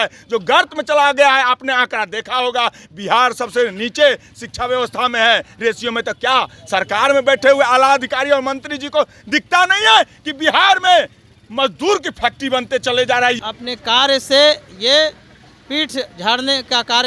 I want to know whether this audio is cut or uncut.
cut